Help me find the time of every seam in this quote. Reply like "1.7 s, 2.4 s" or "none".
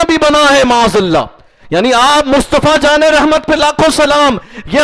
none